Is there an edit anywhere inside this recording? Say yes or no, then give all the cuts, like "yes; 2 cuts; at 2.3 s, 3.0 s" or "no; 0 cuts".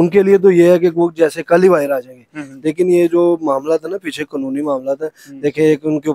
no; 0 cuts